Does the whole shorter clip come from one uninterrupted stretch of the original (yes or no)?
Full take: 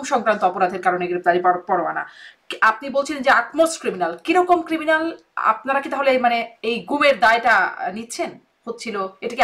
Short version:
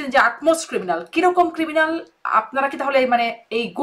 yes